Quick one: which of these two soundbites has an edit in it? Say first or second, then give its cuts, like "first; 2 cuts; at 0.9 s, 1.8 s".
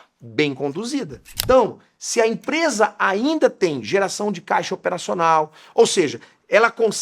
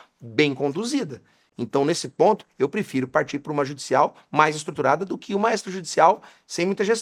first; 1 cut; at 1.3 s